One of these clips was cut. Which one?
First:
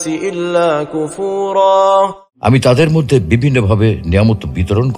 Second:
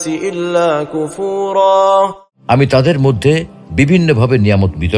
first; 1 cut; at 2.2 s

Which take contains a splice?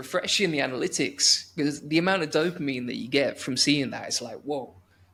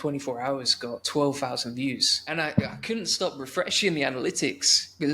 second; 2 cuts; at 1.0 s, 2.1 s

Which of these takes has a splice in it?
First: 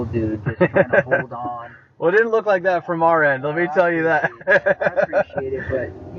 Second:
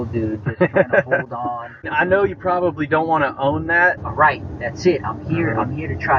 second; 2 cuts; at 1.9 s, 4.0 s

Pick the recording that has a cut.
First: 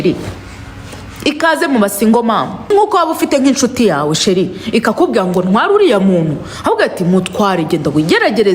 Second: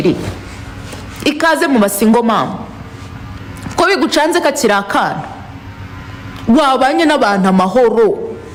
first; 1 cut; at 2.7 s

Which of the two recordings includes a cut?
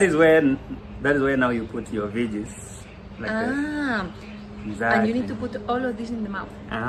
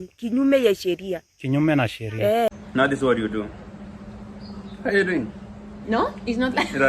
second; 1 cut; at 2.6 s

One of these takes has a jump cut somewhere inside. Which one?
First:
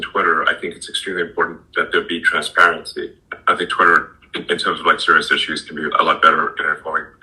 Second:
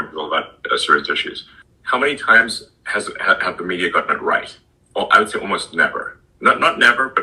first; 1 cut; at 3.2 s

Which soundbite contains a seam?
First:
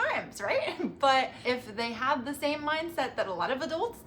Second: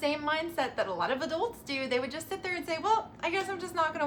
first; 1 cut; at 1.4 s

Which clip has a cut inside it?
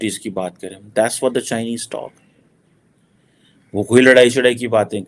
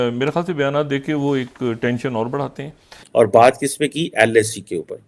second; 1 cut; at 3.0 s

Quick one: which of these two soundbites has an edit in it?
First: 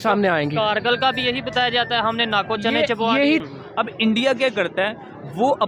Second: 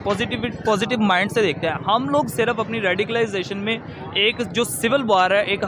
first; 1 cut; at 3.4 s

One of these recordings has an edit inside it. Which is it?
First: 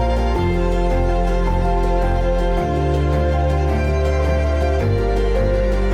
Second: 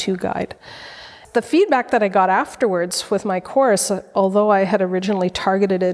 second; 1 cut; at 1.1 s

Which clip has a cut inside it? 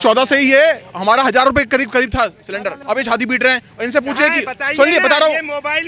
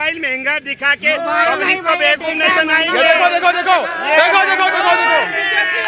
first; 1 cut; at 2.8 s

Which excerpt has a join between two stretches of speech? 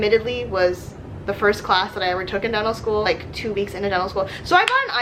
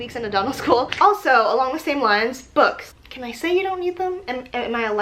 second; 1 cut; at 0.9 s

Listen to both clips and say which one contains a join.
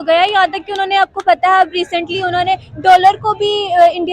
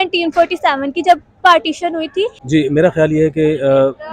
second; 1 cut; at 2.4 s

